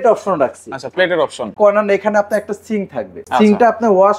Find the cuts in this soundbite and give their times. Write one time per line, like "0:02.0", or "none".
0:01.5
0:03.2